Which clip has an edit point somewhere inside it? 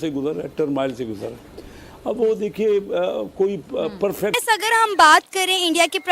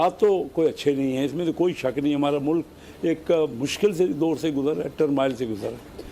first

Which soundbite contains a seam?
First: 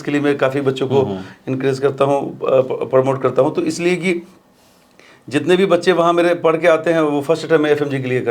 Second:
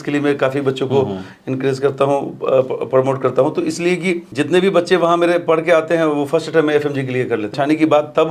second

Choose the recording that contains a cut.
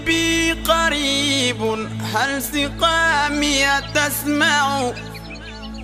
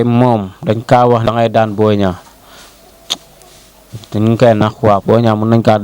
second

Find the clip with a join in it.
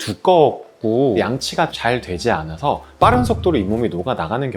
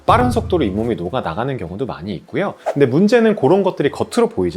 second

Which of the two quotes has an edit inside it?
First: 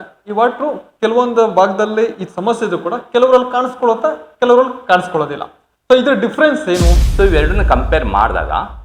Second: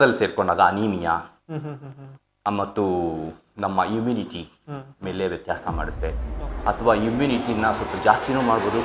first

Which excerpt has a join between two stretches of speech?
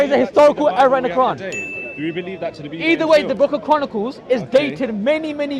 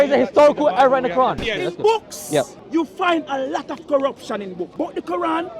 second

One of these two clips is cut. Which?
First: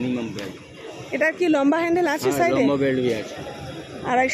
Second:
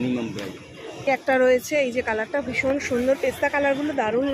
second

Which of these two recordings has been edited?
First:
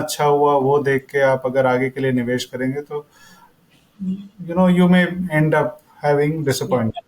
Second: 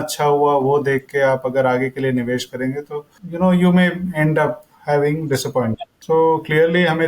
second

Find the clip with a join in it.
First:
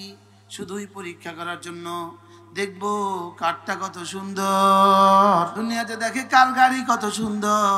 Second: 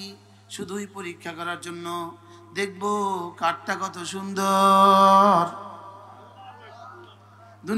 first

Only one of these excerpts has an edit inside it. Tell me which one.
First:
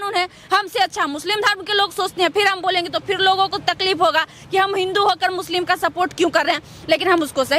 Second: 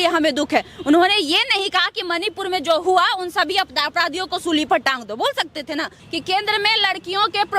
second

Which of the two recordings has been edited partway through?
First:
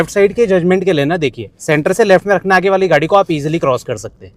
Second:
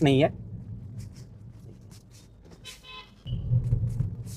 second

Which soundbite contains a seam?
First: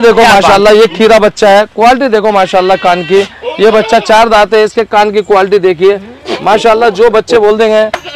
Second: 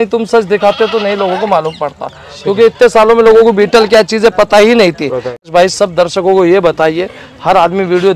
second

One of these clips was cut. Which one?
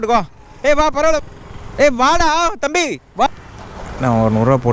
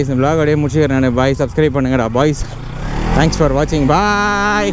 first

